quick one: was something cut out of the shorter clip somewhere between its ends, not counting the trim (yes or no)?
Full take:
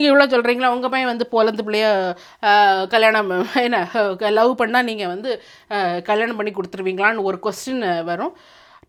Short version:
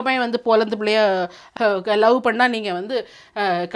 yes